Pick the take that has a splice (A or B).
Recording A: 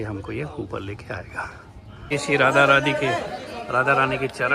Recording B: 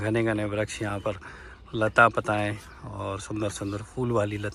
A